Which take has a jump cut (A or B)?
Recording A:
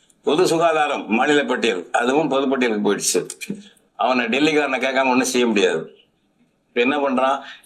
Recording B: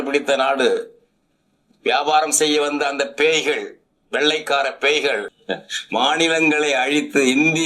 B